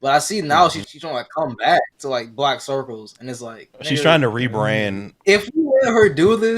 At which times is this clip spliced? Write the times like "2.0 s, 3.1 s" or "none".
0.8 s, 2.0 s, 5.2 s